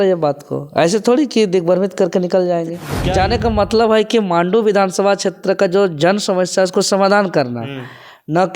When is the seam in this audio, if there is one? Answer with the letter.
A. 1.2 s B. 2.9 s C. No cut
B